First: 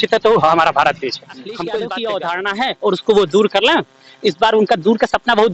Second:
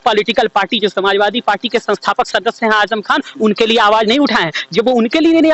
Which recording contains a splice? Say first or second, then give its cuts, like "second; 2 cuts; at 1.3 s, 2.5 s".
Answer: first; 1 cut; at 1.6 s